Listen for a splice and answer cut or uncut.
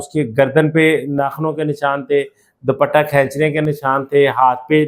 uncut